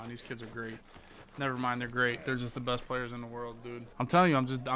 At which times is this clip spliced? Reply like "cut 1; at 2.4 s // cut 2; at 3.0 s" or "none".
cut 1; at 3.8 s